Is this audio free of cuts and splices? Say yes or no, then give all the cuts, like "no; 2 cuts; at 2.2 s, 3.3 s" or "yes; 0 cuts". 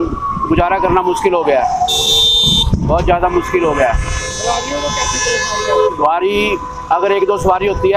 yes; 0 cuts